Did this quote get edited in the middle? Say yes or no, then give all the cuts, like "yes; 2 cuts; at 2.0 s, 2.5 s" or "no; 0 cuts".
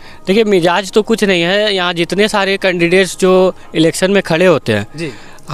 no; 0 cuts